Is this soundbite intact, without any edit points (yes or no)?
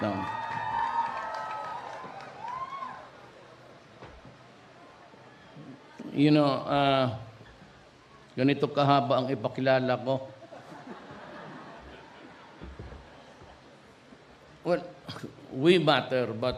no